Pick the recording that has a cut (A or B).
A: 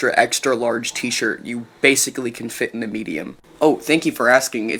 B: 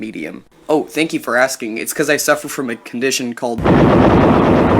B